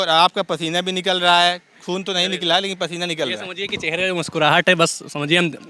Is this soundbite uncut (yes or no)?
yes